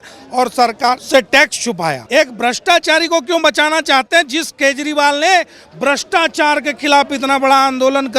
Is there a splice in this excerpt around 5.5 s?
no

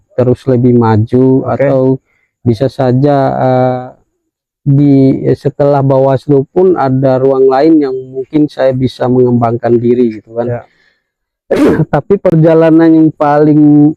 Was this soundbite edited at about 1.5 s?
no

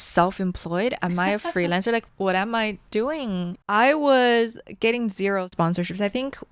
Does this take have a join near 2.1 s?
yes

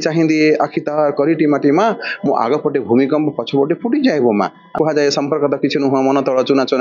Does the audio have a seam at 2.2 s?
no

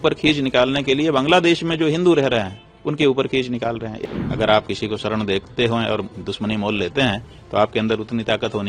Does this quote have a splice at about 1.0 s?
no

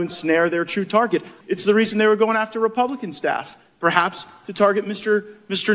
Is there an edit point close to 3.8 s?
no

